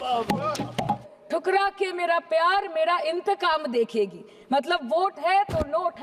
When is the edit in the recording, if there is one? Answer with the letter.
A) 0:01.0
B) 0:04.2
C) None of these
A